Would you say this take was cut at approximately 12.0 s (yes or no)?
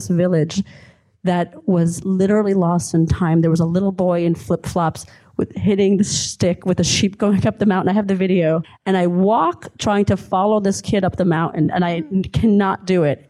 no